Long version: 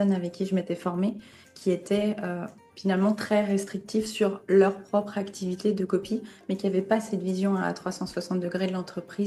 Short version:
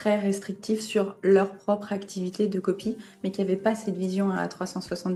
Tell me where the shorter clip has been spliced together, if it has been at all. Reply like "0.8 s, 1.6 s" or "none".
none

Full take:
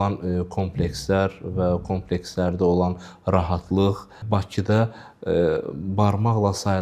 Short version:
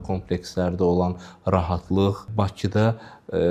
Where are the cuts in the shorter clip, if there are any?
2.2 s

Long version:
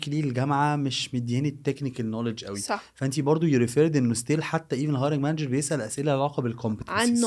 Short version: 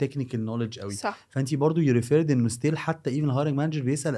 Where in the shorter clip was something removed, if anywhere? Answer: none

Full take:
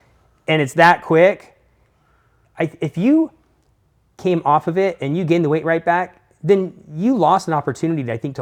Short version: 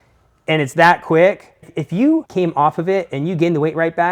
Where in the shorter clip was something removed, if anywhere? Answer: 1.7 s, 2.3 s

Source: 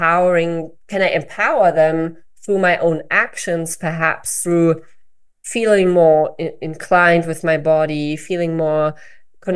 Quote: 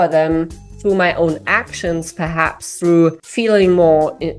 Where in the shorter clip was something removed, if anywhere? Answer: 3.3 s

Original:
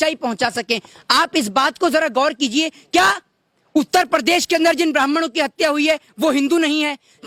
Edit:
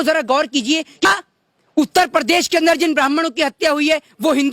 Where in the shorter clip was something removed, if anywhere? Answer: 1.0 s

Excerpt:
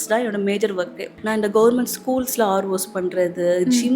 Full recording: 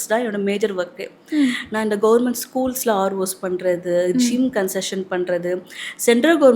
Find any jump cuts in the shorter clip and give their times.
1.2 s

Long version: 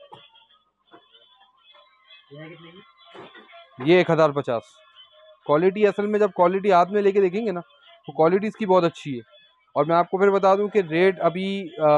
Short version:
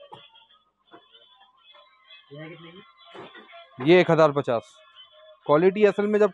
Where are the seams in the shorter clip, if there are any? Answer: none

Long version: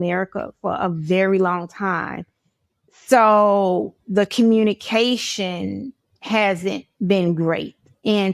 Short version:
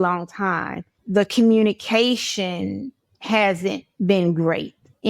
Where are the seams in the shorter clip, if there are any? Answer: 0.9 s

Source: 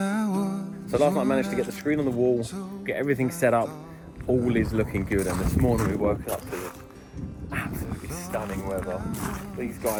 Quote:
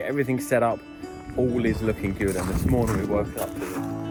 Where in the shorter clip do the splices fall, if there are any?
none

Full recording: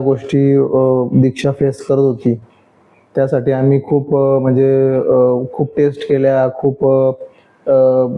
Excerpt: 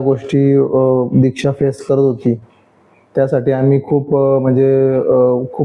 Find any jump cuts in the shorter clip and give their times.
none

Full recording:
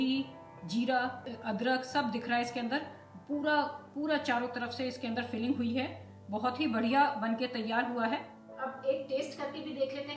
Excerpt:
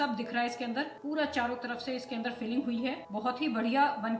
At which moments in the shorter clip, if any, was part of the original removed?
1.0 s, 3.0 s

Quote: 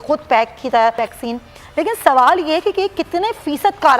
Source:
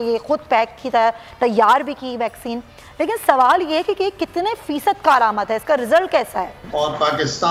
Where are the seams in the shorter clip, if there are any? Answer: 1.1 s

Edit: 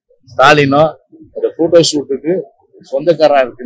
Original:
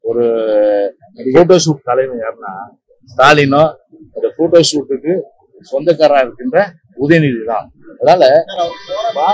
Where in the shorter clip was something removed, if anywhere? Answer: none

